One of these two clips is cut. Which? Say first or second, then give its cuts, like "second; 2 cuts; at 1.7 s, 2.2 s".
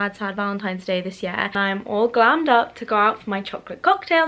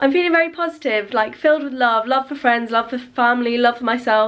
first; 1 cut; at 1.6 s